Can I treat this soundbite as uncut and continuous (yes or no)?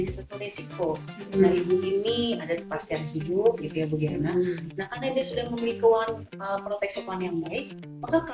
yes